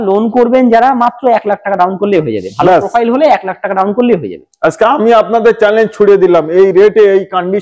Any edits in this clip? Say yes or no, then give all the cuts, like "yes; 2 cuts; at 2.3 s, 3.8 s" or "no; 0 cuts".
no; 0 cuts